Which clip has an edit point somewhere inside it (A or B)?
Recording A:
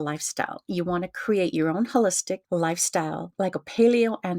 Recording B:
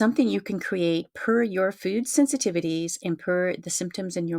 A